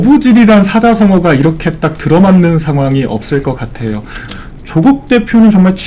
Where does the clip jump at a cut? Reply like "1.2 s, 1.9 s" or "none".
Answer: 4.3 s